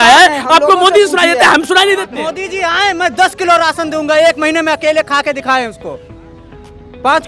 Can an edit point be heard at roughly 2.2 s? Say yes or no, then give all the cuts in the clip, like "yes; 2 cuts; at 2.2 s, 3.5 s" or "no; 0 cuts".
yes; 1 cut; at 2.2 s